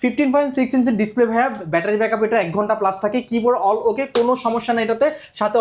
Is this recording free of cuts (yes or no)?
yes